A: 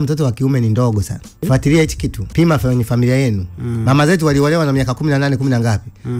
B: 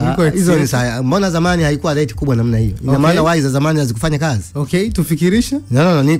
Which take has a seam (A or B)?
A